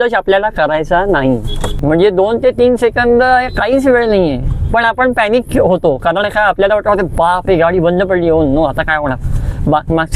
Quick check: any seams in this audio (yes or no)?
yes